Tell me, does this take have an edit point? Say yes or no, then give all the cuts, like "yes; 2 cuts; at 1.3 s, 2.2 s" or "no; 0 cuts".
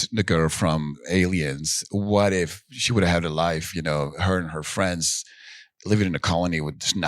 yes; 1 cut; at 1.0 s